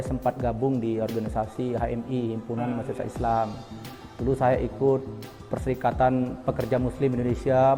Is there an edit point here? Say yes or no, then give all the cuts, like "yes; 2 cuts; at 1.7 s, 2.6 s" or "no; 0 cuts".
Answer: no; 0 cuts